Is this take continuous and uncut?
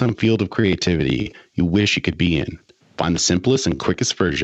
yes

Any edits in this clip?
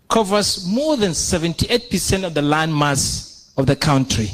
no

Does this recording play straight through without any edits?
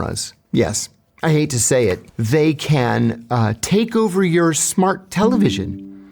no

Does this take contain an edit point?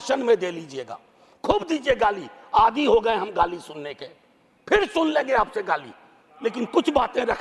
no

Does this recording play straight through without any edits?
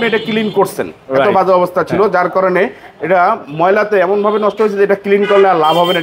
yes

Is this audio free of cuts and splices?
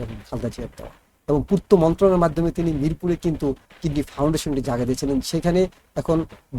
yes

